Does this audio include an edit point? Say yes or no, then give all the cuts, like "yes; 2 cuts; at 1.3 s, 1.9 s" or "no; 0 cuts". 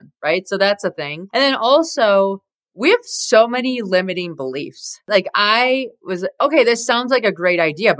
yes; 1 cut; at 5.1 s